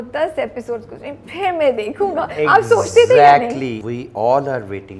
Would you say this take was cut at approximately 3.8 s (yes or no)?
yes